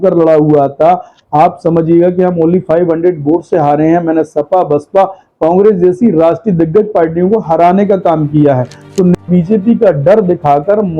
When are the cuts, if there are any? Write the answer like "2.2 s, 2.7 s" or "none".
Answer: 9.2 s